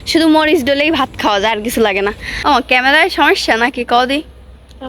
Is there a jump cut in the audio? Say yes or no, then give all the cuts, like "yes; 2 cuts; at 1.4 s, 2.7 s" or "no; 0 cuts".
yes; 1 cut; at 2.3 s